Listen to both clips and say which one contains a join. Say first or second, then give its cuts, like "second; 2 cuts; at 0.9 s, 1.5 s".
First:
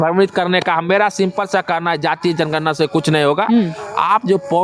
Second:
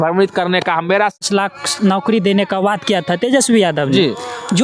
second; 1 cut; at 1.2 s